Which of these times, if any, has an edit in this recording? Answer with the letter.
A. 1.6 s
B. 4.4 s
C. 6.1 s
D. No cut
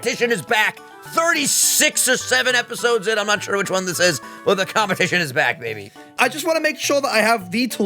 C